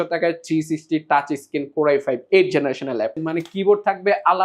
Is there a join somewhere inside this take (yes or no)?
yes